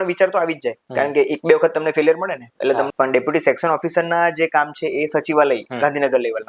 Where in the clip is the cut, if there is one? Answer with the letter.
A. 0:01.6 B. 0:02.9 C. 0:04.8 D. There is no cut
B